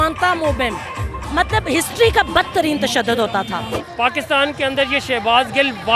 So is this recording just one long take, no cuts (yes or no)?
no